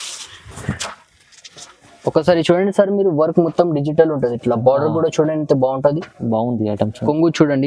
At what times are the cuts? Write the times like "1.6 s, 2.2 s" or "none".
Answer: none